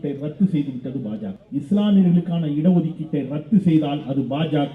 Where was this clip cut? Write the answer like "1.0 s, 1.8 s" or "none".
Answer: 1.4 s